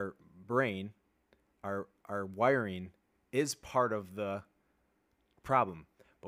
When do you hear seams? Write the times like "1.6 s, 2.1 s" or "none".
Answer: none